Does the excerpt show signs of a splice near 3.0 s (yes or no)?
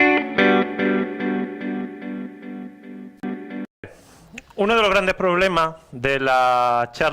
yes